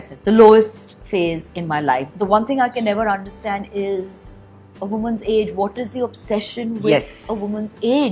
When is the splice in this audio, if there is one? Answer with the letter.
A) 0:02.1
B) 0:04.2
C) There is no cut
A